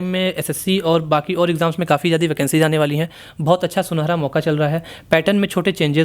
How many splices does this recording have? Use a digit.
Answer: 0